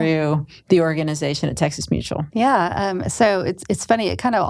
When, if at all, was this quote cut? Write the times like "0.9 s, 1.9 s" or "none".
none